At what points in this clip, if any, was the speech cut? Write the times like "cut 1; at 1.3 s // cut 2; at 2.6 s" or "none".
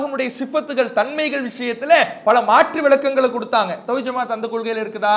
none